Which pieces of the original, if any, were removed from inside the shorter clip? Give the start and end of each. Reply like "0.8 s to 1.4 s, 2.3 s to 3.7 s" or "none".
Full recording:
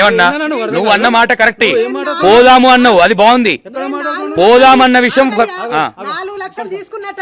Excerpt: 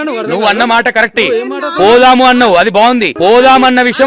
3.5 s to 4.3 s